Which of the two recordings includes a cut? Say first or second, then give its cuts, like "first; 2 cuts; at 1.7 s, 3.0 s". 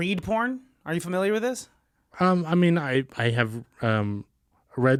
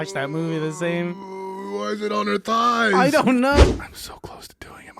second; 1 cut; at 3.6 s